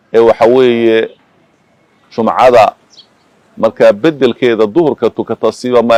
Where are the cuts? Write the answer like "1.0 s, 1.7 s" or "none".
none